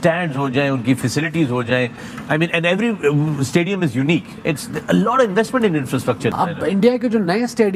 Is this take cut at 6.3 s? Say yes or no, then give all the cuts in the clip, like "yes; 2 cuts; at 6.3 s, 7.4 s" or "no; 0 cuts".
yes; 1 cut; at 6.3 s